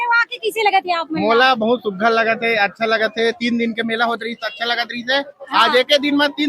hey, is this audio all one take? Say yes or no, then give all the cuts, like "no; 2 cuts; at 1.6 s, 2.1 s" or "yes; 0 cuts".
yes; 0 cuts